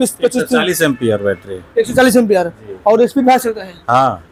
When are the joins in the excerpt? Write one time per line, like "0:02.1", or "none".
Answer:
none